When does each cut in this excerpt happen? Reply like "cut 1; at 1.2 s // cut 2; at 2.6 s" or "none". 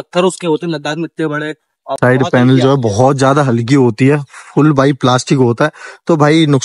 cut 1; at 2.0 s